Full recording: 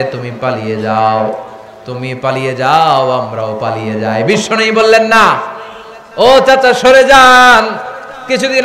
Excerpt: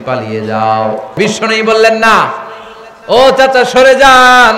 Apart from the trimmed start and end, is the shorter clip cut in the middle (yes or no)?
yes